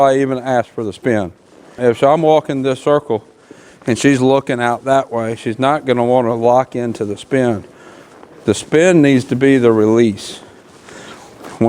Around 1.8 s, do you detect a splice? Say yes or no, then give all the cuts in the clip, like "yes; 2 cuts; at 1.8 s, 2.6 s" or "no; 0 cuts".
yes; 1 cut; at 1.8 s